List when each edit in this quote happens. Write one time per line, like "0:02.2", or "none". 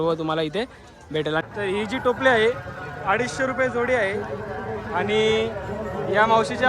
0:01.4